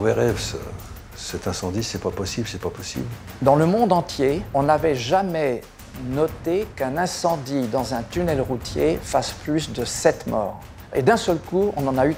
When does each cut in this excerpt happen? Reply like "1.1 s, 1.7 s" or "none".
3.1 s, 4.4 s, 10.9 s

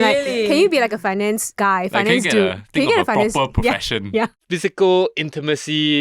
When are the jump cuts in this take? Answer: 4.3 s

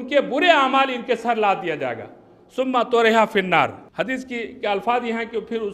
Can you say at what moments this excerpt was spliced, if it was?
3.8 s

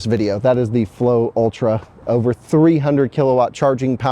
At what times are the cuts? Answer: none

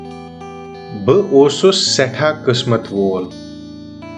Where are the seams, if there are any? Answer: 3.3 s

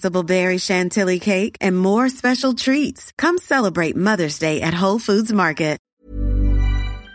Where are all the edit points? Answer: 5.9 s

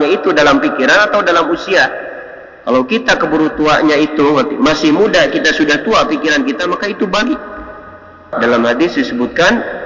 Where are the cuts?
8.3 s

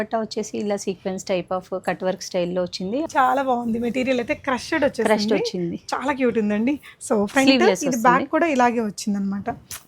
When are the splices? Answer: 3.1 s

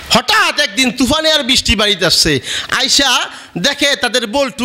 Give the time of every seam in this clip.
none

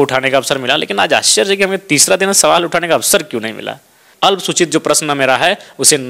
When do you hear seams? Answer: 4.0 s

